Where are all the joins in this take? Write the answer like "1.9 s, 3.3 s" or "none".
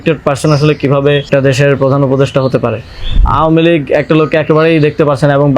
1.3 s, 3.2 s